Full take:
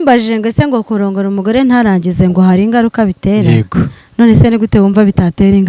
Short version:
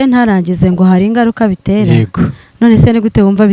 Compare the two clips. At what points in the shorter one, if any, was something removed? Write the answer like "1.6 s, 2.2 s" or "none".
none